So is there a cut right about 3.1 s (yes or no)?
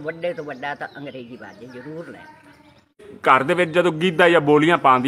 yes